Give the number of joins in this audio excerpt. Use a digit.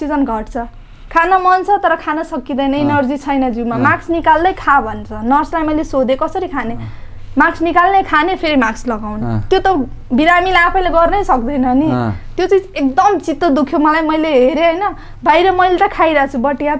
0